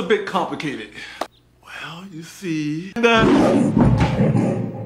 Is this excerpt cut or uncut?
cut